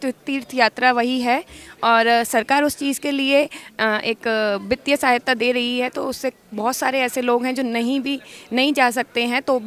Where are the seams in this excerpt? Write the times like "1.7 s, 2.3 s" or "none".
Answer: none